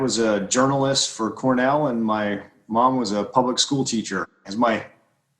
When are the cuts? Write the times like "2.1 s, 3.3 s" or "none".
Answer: 4.4 s